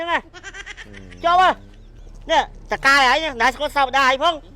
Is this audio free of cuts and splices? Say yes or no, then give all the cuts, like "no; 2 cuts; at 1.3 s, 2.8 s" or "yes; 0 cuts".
no; 1 cut; at 2.1 s